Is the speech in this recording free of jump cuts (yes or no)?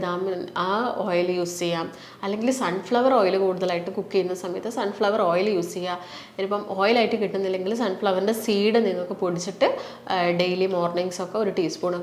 yes